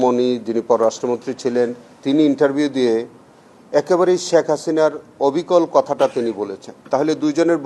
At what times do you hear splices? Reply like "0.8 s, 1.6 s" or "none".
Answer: none